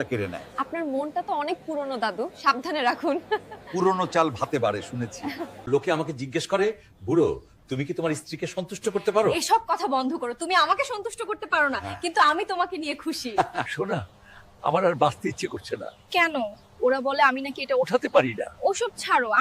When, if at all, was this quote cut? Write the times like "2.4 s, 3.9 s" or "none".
5.6 s